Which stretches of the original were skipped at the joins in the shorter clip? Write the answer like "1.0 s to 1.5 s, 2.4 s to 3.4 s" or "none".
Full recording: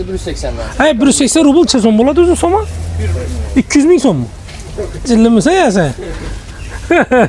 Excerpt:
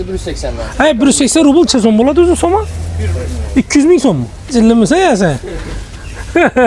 4.3 s to 4.9 s